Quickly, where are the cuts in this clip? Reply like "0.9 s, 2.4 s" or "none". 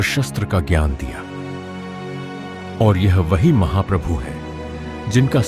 1.2 s, 2.8 s